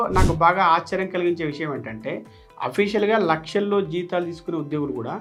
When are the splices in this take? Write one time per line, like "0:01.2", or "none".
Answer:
none